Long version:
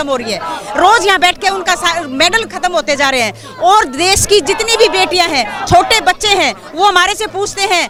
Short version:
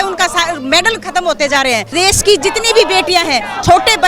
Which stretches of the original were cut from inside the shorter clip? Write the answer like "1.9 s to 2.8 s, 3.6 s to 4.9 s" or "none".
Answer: 3.4 s to 3.9 s

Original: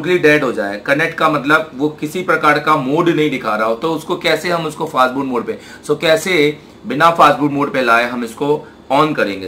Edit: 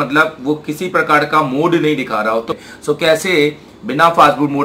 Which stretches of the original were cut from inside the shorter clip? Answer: 3.9 s to 5.5 s

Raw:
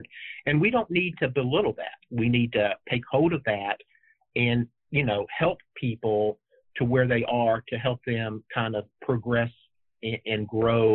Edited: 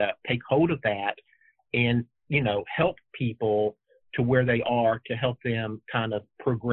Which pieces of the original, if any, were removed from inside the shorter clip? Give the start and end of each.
none

